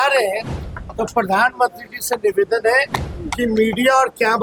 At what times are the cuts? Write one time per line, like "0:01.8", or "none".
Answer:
none